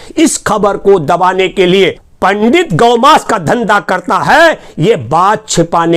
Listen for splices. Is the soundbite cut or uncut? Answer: cut